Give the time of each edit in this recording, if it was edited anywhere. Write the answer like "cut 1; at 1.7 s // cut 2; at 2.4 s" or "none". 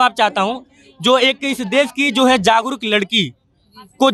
none